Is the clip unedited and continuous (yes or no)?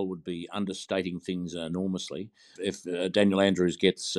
no